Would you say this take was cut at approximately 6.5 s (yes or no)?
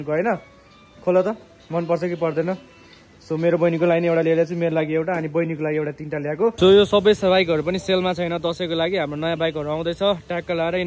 yes